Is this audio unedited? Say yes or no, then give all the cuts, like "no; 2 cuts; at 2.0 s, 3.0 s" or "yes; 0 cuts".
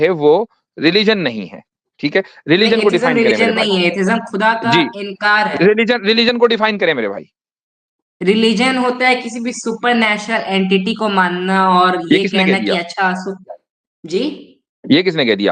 yes; 0 cuts